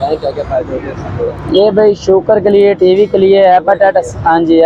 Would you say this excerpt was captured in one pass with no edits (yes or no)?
yes